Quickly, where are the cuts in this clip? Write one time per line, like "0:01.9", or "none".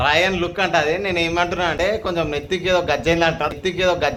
none